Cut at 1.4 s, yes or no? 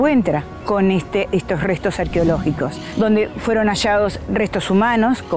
no